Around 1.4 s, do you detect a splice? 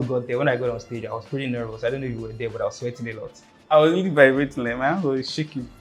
no; 1 cut; at 3.5 s

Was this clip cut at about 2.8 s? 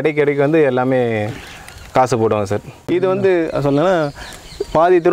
yes; 1 cut; at 2.8 s

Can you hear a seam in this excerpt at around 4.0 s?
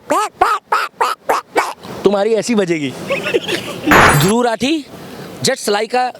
yes; 1 cut; at 4.0 s

